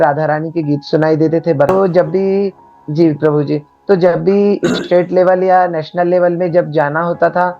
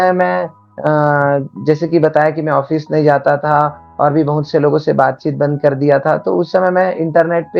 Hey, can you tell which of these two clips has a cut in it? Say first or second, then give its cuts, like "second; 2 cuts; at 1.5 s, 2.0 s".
first; 1 cut; at 1.7 s